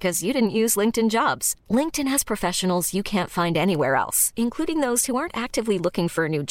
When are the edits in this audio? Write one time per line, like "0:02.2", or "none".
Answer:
none